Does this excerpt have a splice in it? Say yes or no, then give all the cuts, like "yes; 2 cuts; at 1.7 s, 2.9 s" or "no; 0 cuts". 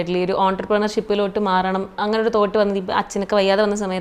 no; 0 cuts